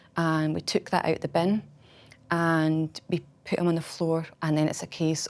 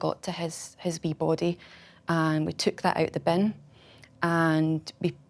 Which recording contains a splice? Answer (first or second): first